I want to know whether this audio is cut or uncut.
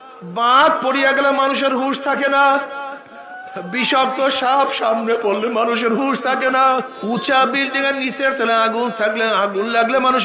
cut